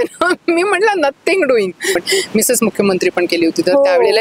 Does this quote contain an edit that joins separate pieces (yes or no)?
yes